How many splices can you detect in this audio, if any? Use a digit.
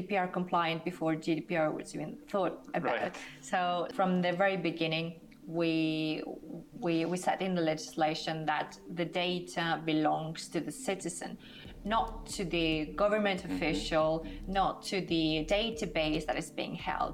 1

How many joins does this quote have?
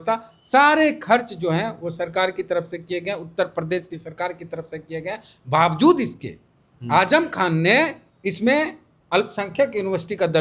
1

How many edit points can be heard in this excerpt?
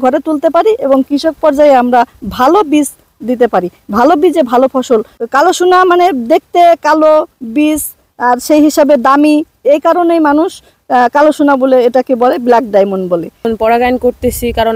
2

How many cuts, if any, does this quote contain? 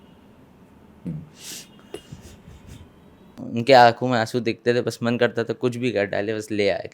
1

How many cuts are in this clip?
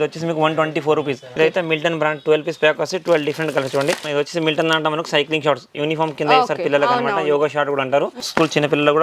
3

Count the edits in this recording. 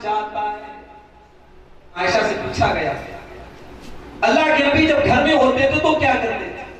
1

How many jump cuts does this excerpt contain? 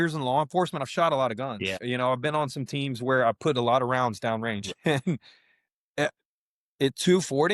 1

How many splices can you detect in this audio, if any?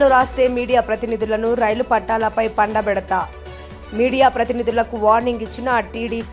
0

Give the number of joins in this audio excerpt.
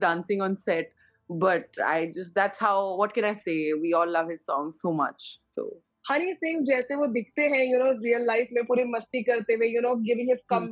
0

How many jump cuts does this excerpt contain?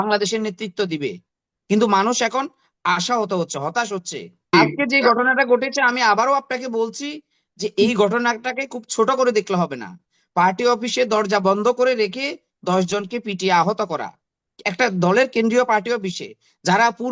1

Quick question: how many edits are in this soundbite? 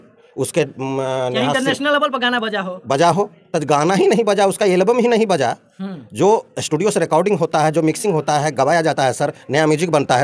0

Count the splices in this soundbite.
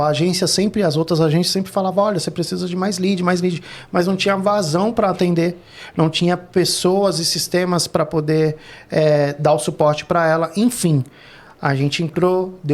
0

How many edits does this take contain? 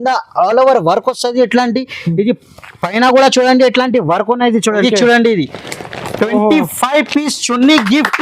1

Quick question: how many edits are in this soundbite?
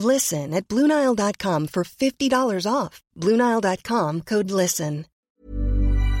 1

